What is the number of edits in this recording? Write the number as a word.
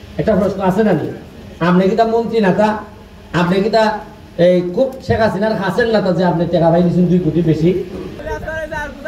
one